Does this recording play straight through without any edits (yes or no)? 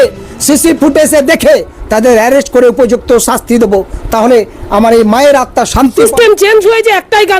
no